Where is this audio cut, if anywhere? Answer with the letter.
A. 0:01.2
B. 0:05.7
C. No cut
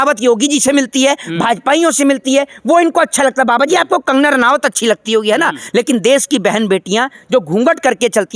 C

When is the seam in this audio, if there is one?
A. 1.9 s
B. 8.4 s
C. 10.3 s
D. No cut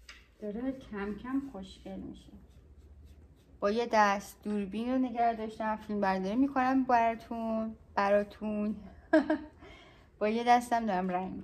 D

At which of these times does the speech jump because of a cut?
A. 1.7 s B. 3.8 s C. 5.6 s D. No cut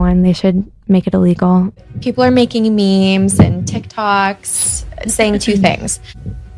A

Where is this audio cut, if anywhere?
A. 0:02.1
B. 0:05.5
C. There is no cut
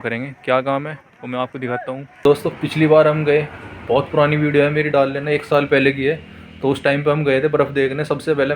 A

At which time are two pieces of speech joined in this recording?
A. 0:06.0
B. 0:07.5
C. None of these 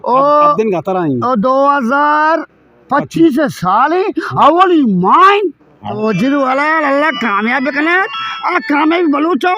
A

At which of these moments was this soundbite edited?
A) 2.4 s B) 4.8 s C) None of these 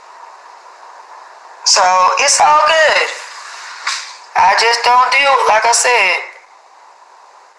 B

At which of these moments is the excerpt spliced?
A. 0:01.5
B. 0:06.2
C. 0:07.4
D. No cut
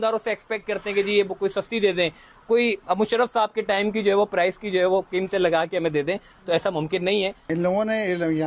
C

